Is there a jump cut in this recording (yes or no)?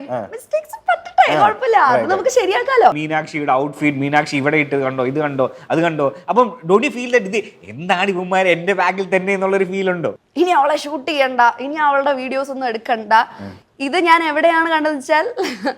yes